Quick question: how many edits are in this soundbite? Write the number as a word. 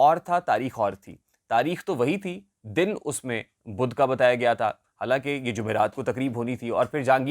zero